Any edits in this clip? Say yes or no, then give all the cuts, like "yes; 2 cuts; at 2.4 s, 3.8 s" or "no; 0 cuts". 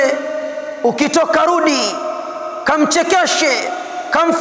no; 0 cuts